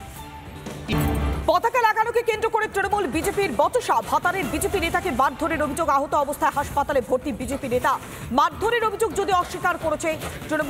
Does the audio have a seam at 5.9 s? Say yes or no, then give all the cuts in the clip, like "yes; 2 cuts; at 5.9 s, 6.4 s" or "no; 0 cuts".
no; 1 cut; at 0.9 s